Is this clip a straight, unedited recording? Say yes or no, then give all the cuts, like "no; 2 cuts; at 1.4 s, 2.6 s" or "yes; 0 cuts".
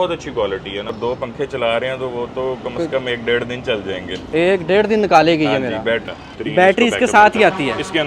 no; 2 cuts; at 0.9 s, 6.3 s